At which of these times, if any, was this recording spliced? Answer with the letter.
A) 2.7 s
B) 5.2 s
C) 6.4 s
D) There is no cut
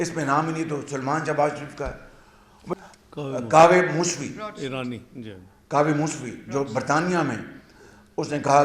A